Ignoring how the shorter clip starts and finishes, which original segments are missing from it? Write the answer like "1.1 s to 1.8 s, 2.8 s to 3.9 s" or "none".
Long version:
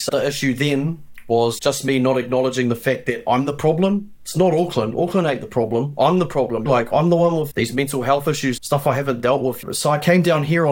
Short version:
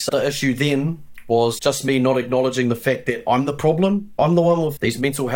4.1 s to 6.9 s